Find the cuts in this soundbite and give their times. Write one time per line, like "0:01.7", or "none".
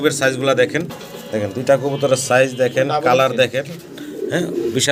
none